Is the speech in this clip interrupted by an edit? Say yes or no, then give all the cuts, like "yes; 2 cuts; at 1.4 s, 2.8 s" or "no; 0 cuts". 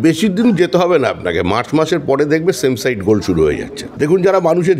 yes; 1 cut; at 3.8 s